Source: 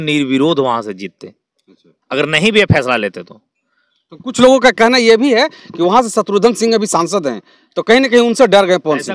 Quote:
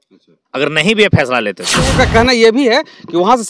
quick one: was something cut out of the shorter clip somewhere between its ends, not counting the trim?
yes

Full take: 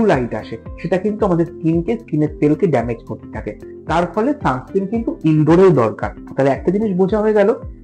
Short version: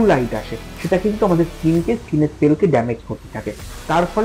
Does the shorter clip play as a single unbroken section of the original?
yes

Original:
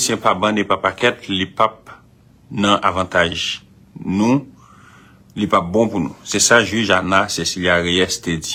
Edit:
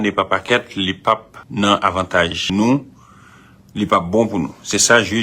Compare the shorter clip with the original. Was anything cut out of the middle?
yes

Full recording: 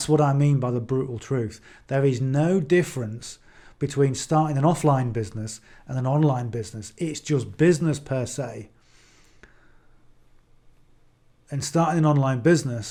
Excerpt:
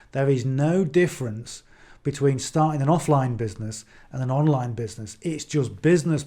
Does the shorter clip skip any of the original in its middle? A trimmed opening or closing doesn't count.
no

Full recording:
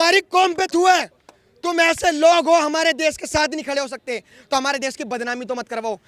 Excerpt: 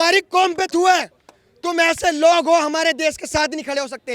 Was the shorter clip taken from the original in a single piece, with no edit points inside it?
yes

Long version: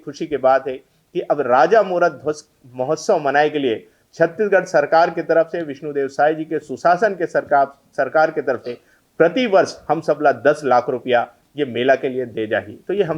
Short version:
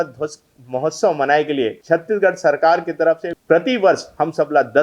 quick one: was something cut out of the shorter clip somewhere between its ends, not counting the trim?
yes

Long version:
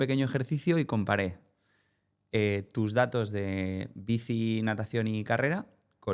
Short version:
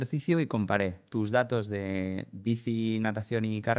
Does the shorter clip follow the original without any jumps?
no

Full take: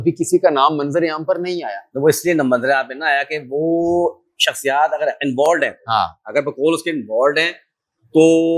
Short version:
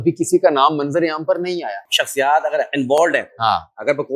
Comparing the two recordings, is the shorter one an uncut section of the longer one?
no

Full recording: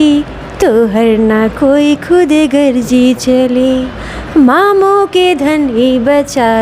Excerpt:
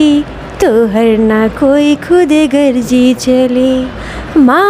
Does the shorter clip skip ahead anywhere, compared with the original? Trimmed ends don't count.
no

